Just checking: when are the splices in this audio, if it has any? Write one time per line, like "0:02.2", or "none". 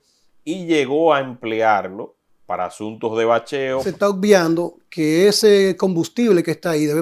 0:03.9